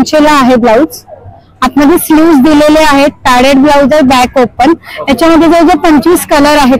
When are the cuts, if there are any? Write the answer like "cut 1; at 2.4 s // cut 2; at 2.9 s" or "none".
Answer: none